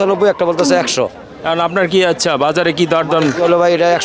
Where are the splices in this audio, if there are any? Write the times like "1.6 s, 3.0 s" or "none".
none